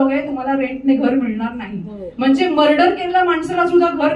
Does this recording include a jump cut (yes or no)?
no